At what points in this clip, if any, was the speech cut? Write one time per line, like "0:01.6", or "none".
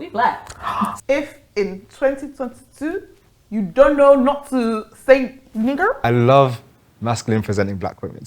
0:01.0
0:06.0